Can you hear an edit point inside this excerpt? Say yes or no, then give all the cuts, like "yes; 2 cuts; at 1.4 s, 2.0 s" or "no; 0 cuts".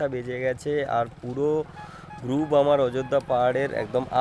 no; 0 cuts